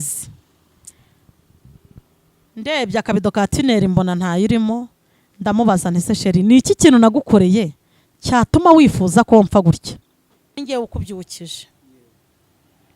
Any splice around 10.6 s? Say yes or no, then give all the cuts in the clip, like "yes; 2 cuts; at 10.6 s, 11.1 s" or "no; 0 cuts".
yes; 1 cut; at 10.6 s